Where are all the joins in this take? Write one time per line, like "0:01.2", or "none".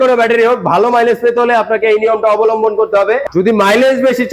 0:03.2